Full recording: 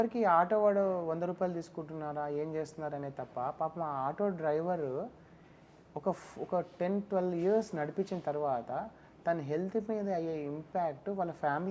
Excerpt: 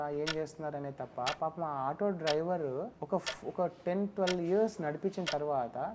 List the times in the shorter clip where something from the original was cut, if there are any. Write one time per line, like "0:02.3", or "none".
0:03.0